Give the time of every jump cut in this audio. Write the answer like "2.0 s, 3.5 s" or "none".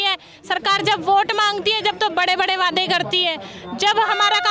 none